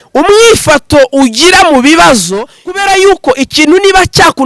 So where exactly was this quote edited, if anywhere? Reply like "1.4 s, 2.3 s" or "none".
2.6 s